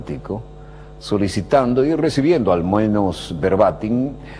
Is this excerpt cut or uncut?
cut